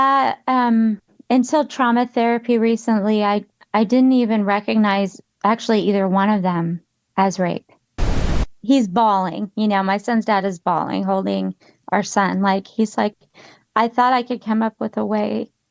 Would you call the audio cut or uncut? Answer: cut